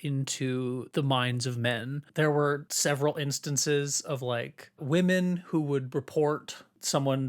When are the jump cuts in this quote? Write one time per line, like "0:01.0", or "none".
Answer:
0:00.9
0:02.0
0:02.7

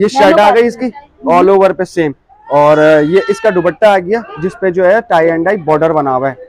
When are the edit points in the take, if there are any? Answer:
none

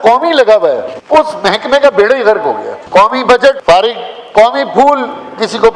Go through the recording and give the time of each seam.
0:00.9
0:02.7
0:03.6

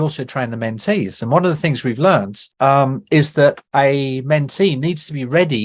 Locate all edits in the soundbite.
0:02.4
0:03.6

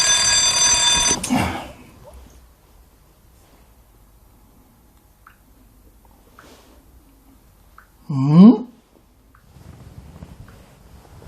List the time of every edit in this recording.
0:01.1

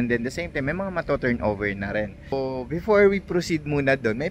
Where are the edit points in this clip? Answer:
0:02.3

